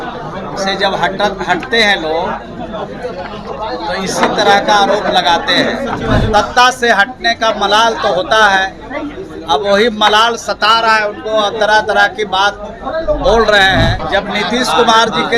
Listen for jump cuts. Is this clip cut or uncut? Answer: cut